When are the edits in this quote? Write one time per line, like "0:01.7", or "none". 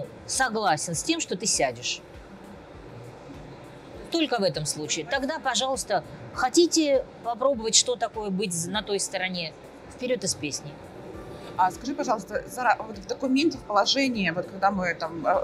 none